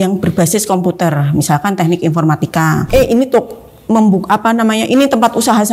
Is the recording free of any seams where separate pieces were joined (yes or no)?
no